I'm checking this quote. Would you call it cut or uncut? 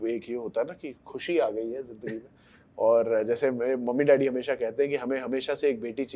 uncut